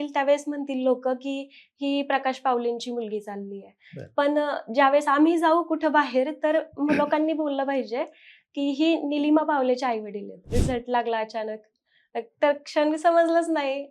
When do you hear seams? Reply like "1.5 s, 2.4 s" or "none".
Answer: 10.4 s

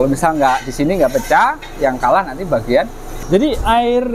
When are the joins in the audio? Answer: 3.1 s

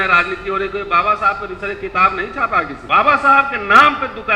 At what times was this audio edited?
2.8 s

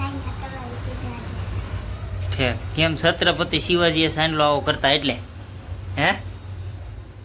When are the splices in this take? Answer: none

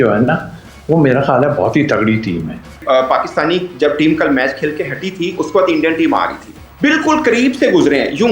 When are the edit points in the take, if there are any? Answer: 2.7 s

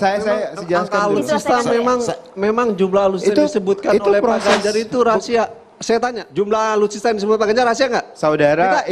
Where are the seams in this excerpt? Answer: 6.2 s

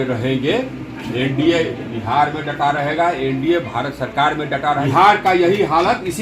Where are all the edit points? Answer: 4.9 s

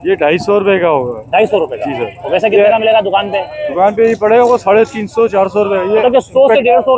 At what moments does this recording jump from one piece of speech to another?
none

